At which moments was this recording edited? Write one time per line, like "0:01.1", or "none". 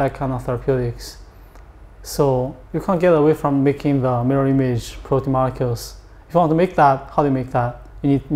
none